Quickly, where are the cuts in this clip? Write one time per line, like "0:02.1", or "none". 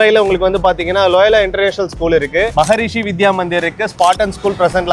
none